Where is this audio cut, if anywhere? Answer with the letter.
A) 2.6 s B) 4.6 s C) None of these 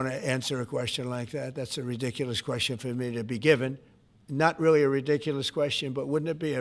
C